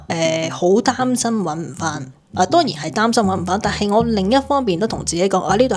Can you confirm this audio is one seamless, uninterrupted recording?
yes; 0 cuts

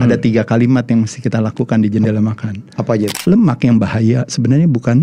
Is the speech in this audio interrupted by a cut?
yes; 1 cut; at 3.2 s

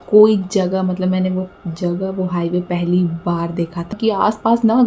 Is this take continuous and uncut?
no; 1 cut; at 3.9 s

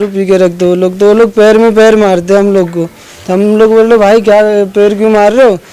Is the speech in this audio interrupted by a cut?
no; 0 cuts

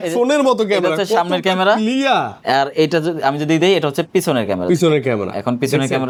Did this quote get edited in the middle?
no; 0 cuts

